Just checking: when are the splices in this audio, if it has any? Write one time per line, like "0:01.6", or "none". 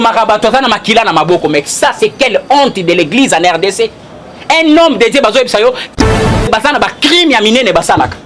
0:06.0